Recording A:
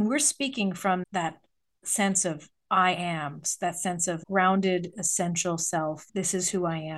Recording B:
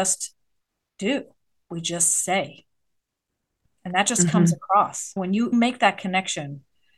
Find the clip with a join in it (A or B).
A